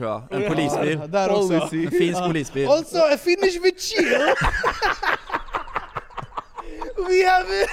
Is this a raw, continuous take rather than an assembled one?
yes; 0 cuts

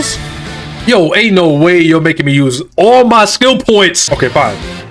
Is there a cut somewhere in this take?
no; 0 cuts

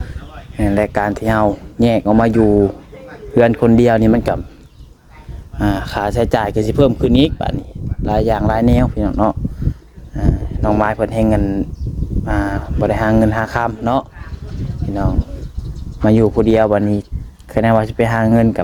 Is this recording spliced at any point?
no; 0 cuts

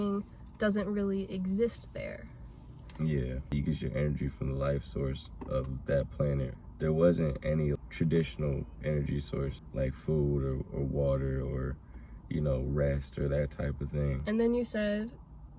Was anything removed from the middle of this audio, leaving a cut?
yes; 5 cuts; at 3.5 s, 6.5 s, 7.8 s, 9.6 s, 14.2 s

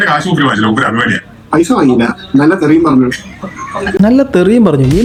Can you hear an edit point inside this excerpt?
no; 0 cuts

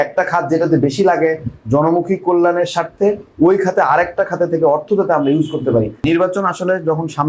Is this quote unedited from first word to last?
no; 1 cut; at 6.1 s

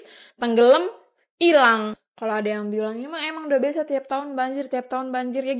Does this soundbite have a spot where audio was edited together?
no; 0 cuts

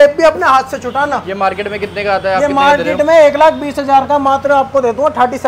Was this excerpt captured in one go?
yes; 0 cuts

